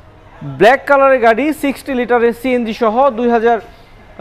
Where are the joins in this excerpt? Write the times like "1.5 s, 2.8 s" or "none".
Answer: none